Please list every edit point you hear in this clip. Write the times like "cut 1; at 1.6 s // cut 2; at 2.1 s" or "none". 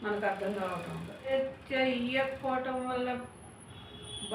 cut 1; at 1.3 s

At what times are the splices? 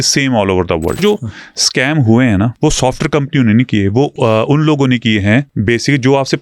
cut 1; at 1.0 s // cut 2; at 2.5 s // cut 3; at 4.1 s // cut 4; at 5.5 s

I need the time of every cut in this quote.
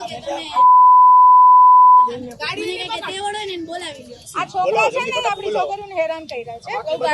cut 1; at 4.2 s

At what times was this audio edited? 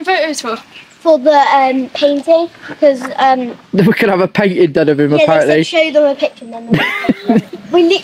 none

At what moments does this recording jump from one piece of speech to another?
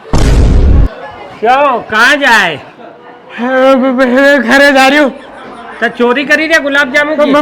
cut 1; at 1.0 s

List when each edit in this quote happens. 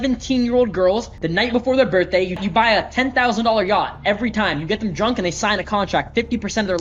cut 1; at 1.2 s // cut 2; at 2.4 s

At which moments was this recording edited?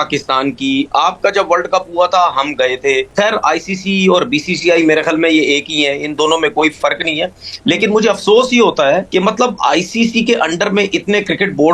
none

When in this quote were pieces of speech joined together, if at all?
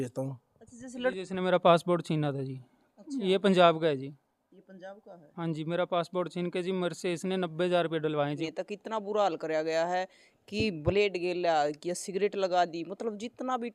cut 1; at 1.2 s // cut 2; at 8.4 s

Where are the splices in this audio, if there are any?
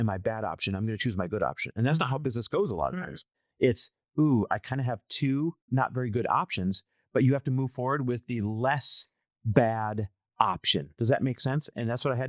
none

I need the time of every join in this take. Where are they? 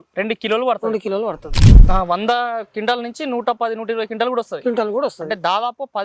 cut 1; at 1.7 s

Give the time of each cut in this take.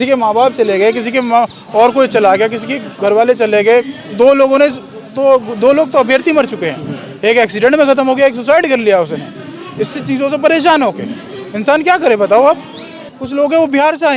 cut 1; at 13.1 s

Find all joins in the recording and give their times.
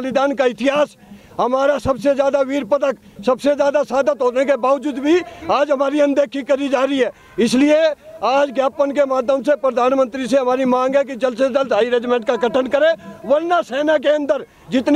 none

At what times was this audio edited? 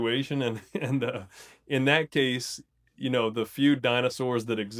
none

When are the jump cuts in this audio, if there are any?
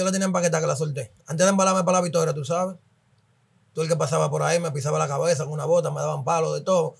none

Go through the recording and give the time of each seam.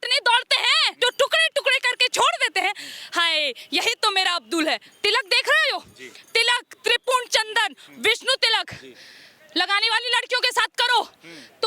cut 1; at 0.9 s // cut 2; at 4.9 s

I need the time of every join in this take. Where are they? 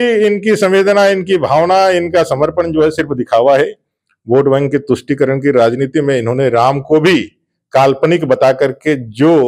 none

